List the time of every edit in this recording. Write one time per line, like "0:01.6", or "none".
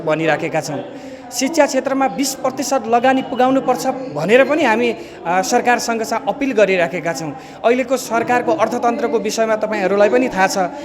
none